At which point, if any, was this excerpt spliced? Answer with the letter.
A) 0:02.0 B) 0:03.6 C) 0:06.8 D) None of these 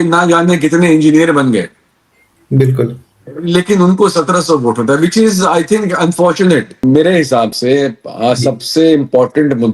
C